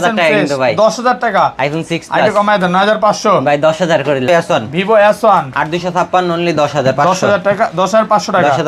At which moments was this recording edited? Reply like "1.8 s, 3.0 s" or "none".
4.3 s